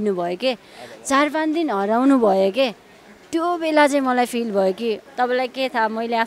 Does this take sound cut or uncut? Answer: cut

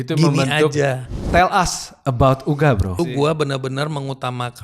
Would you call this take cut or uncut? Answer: cut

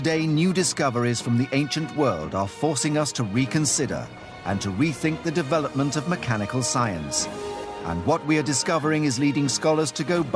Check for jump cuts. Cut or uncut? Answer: uncut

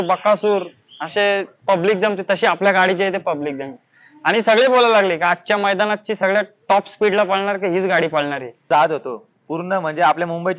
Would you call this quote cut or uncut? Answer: cut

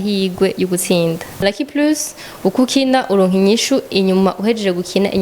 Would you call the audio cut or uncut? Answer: cut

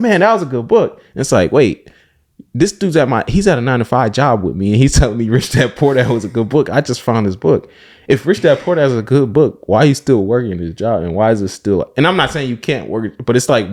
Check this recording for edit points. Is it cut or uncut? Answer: uncut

